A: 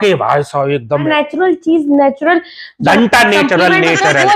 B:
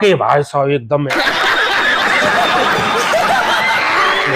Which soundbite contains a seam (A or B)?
A